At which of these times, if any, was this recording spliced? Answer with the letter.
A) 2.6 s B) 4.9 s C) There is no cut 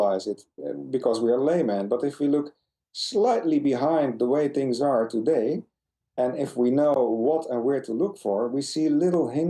C